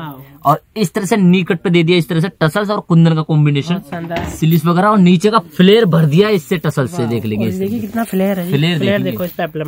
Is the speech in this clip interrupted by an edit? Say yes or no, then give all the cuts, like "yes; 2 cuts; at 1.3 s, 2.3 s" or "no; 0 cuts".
no; 0 cuts